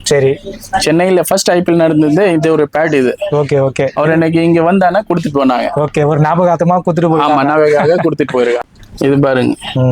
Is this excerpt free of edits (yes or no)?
no